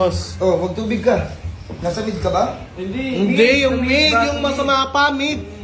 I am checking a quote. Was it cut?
no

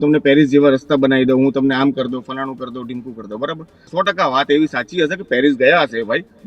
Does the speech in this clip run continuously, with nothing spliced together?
no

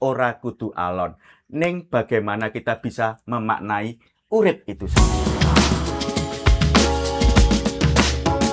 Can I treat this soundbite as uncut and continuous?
no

